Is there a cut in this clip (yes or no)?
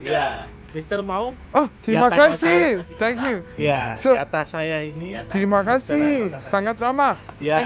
no